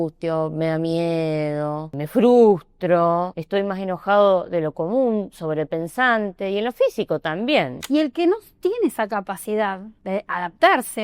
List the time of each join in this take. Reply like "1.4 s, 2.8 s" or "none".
2.0 s, 3.4 s, 7.8 s, 9.9 s